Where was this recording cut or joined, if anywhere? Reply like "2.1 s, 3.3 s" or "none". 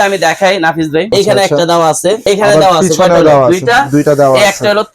1.1 s, 2.2 s